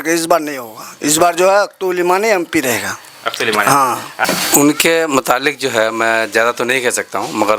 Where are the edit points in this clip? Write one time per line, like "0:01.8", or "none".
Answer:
0:04.2